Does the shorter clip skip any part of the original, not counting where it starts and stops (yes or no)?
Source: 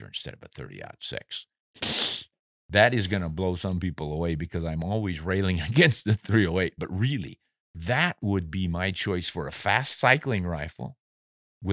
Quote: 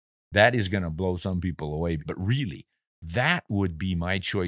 yes